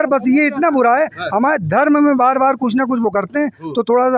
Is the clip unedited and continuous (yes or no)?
yes